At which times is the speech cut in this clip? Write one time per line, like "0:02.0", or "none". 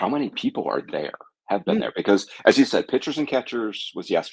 none